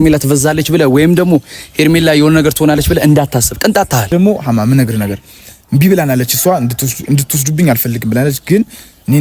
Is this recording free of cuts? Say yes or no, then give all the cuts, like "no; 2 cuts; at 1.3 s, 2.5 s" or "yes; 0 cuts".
no; 1 cut; at 4.1 s